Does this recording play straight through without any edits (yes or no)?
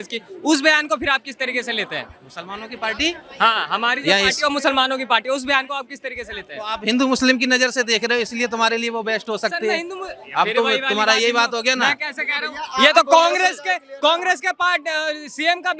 yes